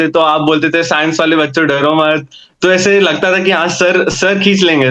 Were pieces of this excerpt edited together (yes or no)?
no